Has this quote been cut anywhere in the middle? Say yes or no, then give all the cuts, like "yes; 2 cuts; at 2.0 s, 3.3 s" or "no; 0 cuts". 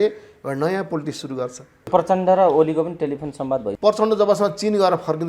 yes; 2 cuts; at 1.9 s, 3.7 s